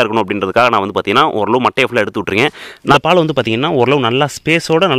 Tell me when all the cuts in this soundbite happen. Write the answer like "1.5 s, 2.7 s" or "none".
2.9 s